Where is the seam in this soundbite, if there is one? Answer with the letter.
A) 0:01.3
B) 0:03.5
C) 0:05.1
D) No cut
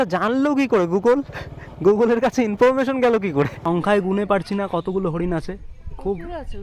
B